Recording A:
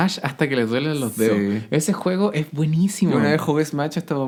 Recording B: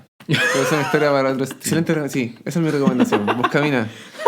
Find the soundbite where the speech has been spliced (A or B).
B